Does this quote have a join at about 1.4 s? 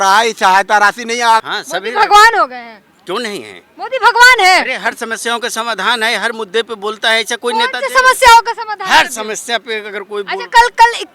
yes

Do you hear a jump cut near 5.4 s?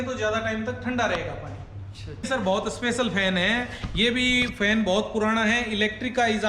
no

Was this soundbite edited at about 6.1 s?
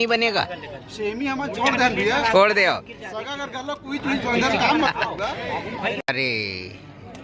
yes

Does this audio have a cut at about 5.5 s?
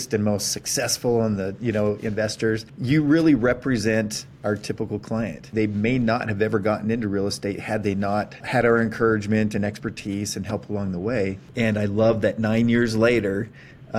yes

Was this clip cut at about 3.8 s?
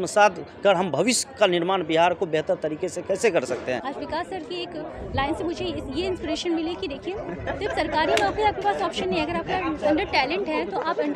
yes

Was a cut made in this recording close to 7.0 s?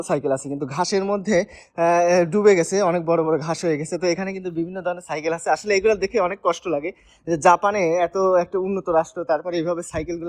no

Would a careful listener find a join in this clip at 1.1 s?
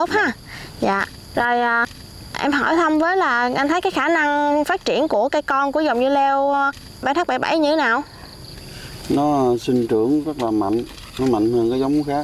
no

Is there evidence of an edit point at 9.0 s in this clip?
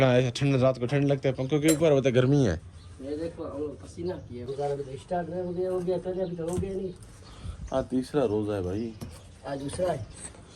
no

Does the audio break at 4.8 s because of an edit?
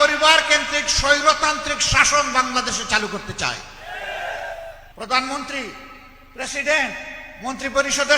yes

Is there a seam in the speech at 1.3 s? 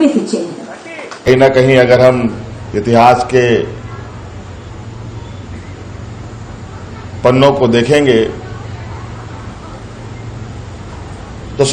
yes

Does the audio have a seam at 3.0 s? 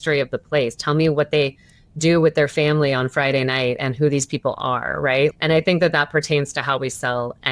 no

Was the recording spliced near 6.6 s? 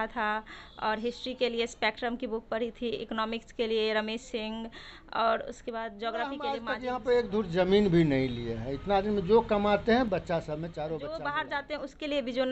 yes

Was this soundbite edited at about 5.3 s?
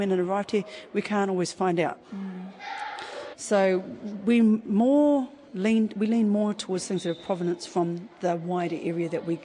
no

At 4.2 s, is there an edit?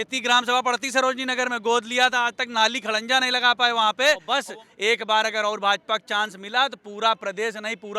yes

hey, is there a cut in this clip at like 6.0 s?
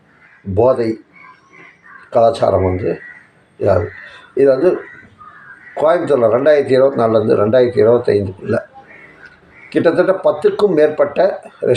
no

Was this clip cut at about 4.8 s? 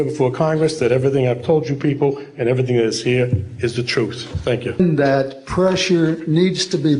yes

